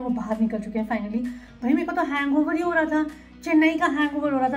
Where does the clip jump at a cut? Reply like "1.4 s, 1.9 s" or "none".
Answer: none